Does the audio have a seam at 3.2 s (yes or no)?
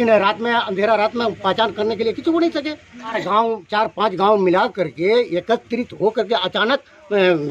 yes